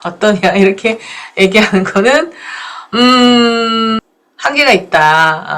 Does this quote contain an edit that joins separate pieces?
no; 0 cuts

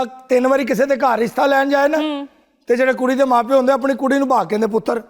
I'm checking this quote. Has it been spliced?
no; 0 cuts

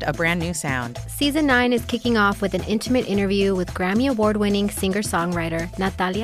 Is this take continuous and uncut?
yes; 0 cuts

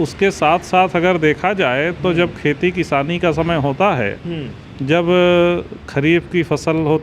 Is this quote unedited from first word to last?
yes; 0 cuts

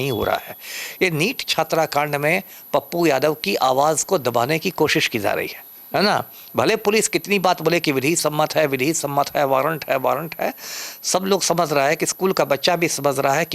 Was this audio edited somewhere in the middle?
no; 0 cuts

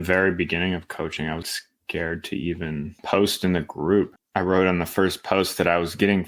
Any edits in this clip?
yes; 3 cuts; at 1.4 s, 3.0 s, 4.2 s

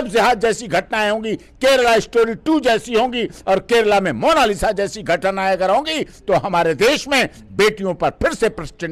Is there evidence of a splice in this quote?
no; 0 cuts

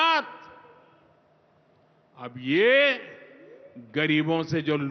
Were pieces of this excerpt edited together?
no; 0 cuts

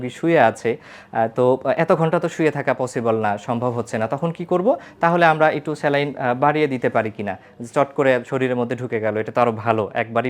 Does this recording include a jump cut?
no; 0 cuts

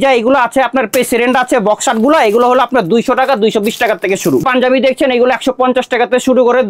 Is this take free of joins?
no; 1 cut; at 4.4 s

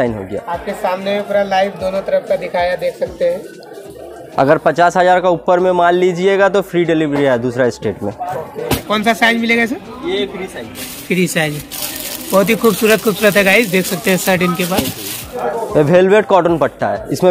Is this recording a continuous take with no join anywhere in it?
no; 3 cuts; at 4.4 s, 8.6 s, 15.3 s

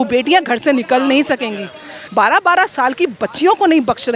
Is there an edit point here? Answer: yes; 1 cut; at 2.0 s

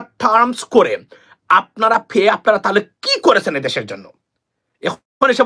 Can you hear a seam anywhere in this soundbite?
no; 0 cuts

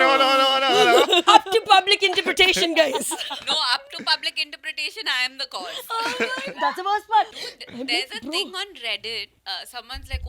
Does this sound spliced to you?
yes; 2 cuts; at 7.3 s, 9.3 s

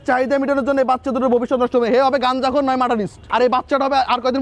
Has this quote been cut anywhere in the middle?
yes; 1 cut; at 3.2 s

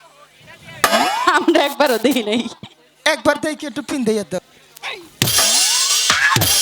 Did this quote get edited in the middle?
yes; 1 cut; at 4.4 s

